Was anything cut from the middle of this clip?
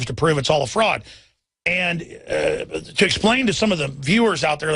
yes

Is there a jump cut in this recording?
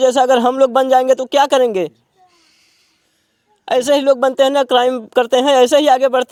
no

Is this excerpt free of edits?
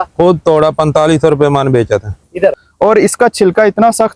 no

